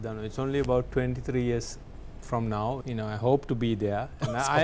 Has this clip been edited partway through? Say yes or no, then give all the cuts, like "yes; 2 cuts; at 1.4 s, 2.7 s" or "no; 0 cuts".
yes; 1 cut; at 2.8 s